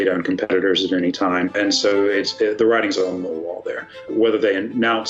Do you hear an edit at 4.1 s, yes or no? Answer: yes